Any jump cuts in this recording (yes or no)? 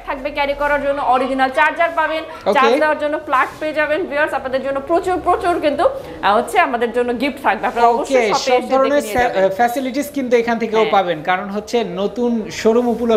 no